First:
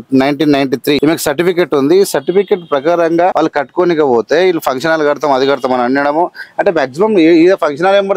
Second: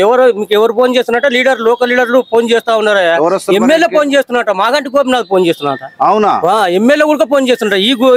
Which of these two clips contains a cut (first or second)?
first